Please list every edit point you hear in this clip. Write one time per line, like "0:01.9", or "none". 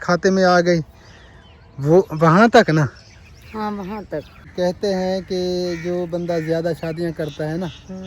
0:04.5